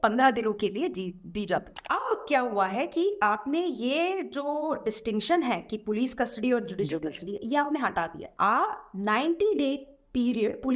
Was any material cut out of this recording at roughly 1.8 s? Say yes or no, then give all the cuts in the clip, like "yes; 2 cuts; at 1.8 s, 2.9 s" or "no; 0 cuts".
yes; 2 cuts; at 1.8 s, 8.2 s